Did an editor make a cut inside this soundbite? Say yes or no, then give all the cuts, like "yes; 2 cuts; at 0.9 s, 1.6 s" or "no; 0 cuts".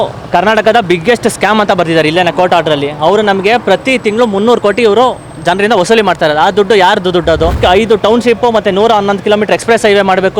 yes; 1 cut; at 7.6 s